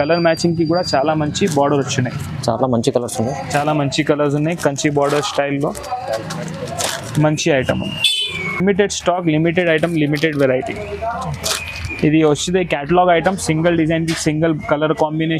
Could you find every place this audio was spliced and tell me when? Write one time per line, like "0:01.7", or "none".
none